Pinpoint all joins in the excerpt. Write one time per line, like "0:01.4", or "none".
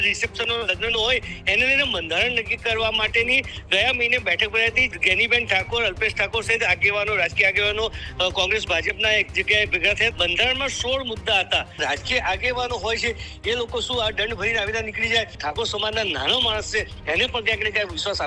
0:04.9
0:10.1
0:11.8
0:15.4